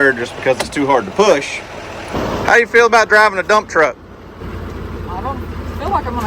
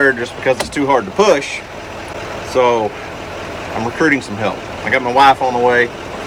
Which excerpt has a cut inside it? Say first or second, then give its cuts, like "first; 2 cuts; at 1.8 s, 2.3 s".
first; 2 cuts; at 2.1 s, 4.4 s